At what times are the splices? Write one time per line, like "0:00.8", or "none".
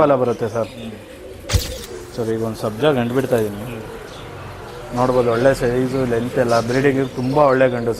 0:01.8